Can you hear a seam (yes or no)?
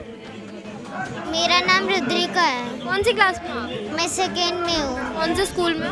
no